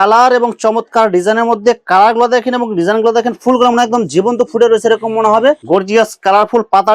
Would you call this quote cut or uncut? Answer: cut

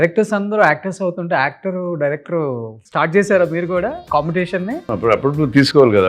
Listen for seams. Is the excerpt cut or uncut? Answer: cut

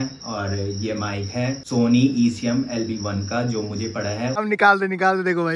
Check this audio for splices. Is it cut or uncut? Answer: cut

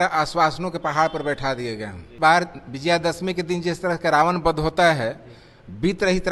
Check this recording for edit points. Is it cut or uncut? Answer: cut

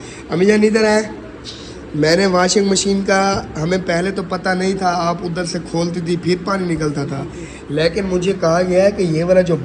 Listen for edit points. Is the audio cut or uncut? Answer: uncut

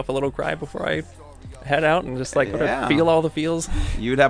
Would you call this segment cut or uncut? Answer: uncut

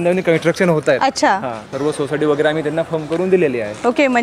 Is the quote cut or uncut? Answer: uncut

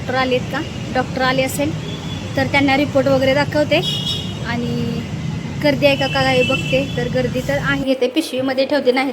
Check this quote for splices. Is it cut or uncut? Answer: cut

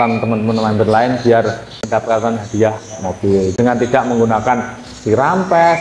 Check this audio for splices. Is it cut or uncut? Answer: uncut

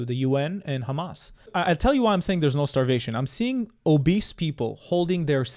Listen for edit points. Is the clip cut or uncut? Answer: cut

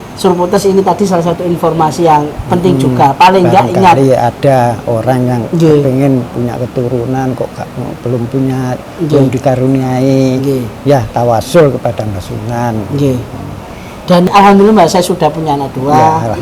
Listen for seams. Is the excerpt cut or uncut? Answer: cut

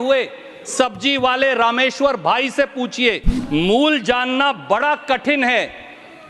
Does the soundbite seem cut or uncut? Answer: cut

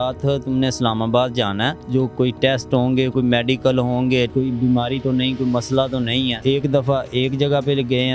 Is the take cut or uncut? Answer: cut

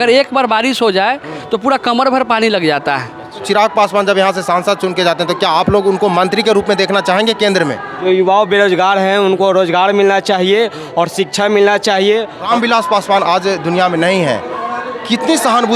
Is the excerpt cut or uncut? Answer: cut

